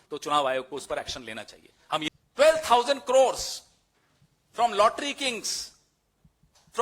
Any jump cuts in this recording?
yes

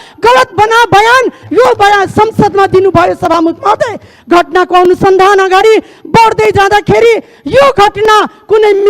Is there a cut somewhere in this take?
no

